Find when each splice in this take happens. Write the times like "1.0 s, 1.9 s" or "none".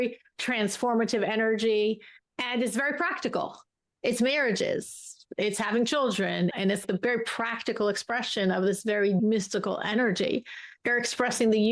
6.5 s, 9.2 s, 10.7 s